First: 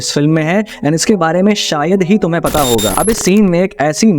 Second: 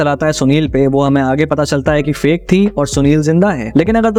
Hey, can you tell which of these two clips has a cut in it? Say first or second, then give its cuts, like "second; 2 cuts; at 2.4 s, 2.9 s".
first; 1 cut; at 2.9 s